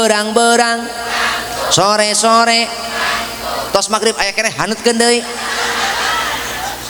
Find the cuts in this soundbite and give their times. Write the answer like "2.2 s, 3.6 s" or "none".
none